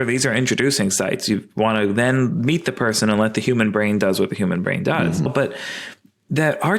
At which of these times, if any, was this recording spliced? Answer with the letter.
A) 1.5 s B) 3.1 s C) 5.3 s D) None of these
C